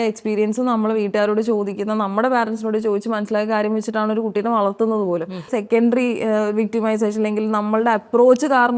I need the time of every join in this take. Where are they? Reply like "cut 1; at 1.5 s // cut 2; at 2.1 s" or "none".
cut 1; at 5.5 s